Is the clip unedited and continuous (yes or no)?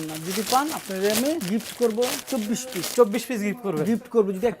no